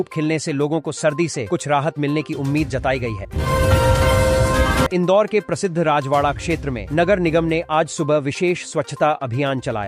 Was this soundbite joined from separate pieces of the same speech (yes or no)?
yes